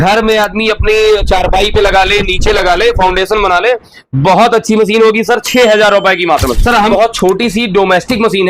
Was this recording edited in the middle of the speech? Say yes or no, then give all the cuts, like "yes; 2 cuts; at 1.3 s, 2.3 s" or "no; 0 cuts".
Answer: yes; 1 cut; at 6.8 s